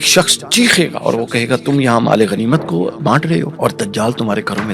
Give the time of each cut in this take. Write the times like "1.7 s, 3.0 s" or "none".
3.5 s

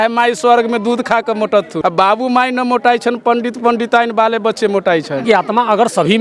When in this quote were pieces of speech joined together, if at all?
1.7 s, 5.2 s

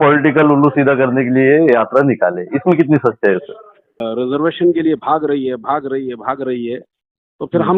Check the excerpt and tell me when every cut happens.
4.0 s

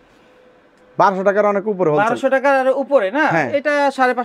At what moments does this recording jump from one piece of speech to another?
none

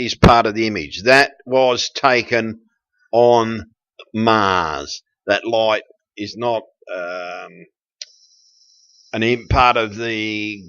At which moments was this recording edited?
4.4 s

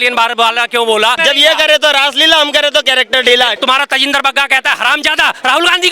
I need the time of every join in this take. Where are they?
1.2 s, 3.5 s

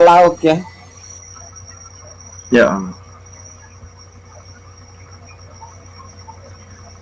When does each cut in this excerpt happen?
none

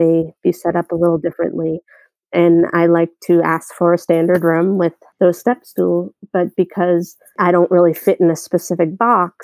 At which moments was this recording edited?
5.0 s, 7.4 s

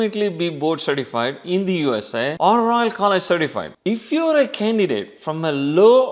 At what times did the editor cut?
3.6 s

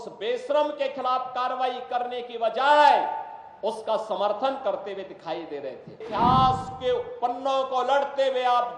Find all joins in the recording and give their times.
6.0 s

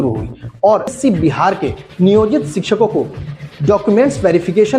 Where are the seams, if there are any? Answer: 1.0 s

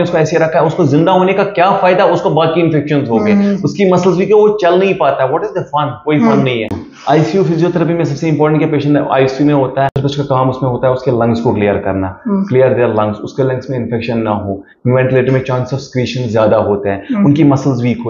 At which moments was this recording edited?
none

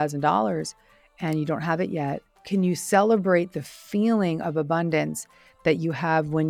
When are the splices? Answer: 2.3 s

